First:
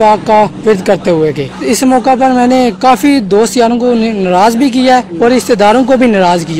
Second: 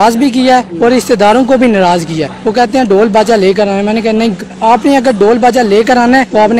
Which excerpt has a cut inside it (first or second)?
first